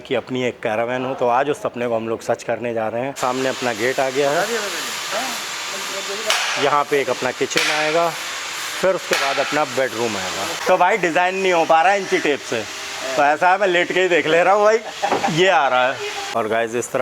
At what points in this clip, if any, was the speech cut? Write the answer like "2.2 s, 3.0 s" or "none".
3.2 s, 10.5 s, 16.2 s